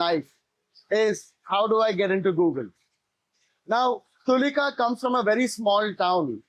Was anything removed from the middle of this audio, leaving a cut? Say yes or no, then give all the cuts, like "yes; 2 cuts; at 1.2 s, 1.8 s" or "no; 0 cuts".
no; 0 cuts